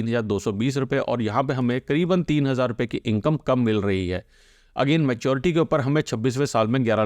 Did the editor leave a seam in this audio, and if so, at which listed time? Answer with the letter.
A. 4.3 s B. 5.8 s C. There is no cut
C